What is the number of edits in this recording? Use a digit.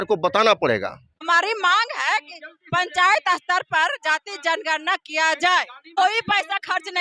2